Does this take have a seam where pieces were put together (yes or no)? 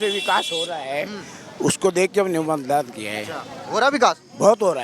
no